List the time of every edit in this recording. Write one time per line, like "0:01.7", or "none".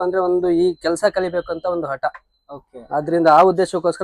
none